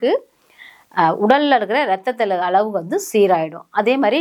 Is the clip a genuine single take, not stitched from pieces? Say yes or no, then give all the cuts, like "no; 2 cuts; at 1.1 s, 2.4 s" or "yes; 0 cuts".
yes; 0 cuts